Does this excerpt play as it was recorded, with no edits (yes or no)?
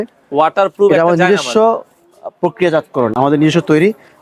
yes